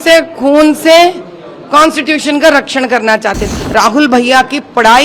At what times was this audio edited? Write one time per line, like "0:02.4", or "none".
0:03.4